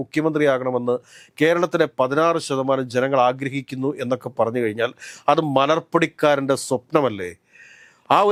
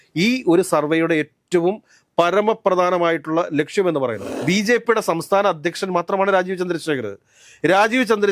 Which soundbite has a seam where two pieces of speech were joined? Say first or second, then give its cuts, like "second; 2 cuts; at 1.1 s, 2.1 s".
second; 1 cut; at 4.3 s